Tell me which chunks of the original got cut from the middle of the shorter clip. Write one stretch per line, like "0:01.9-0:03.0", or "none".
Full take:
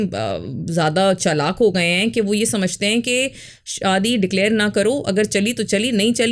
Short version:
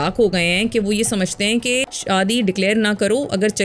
0:03.4-0:03.7